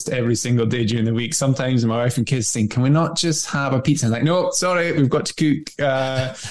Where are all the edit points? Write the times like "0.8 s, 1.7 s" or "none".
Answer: none